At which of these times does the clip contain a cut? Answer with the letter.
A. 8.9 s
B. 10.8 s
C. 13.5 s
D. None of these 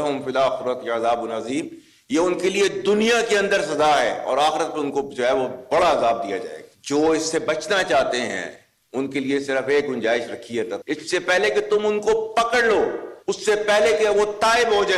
B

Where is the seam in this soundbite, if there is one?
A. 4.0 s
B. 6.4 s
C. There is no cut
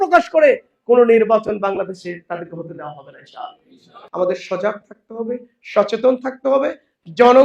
A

